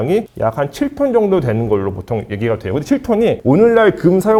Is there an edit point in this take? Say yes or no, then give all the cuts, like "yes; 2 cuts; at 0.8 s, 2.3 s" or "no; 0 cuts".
no; 0 cuts